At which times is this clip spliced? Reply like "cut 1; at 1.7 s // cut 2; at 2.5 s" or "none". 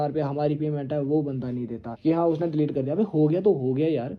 cut 1; at 1.8 s